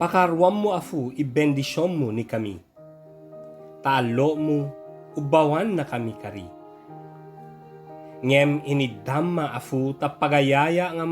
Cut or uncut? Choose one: cut